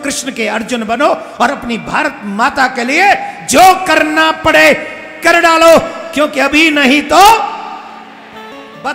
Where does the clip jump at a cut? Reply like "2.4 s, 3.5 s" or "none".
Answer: none